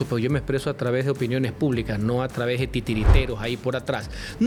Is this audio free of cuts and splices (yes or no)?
yes